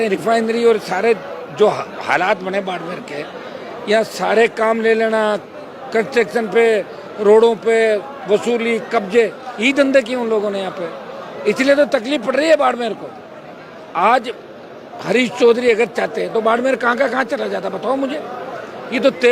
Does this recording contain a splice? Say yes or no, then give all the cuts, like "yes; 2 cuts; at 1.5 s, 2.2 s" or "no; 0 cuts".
no; 0 cuts